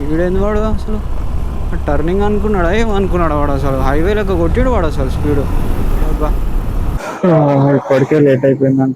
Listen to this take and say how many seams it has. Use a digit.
1